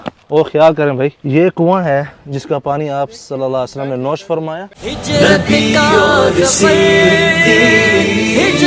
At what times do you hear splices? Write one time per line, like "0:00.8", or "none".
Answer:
0:01.2
0:04.7